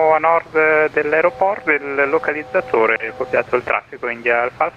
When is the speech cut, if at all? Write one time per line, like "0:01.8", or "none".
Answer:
none